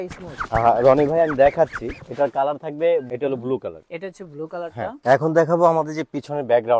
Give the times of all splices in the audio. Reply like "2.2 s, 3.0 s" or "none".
3.1 s, 5.0 s